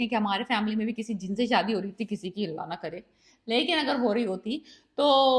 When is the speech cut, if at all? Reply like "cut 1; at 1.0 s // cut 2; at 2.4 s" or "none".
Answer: none